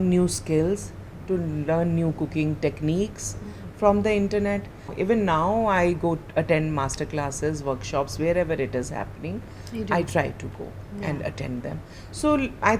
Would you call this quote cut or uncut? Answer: cut